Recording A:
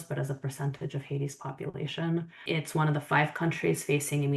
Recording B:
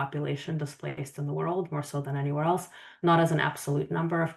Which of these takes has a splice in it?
A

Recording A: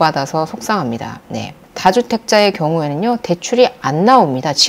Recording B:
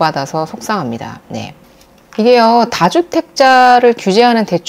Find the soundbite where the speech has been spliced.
A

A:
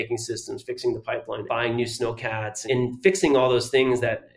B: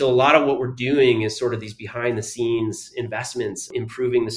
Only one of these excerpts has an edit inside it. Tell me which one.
A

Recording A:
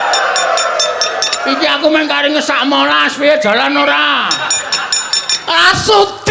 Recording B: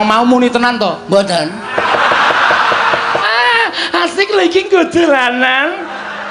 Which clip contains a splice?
B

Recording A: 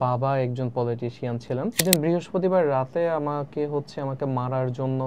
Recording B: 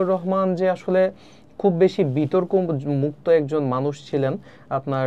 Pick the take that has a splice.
A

